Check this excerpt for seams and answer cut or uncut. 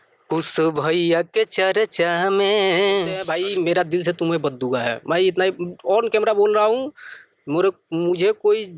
cut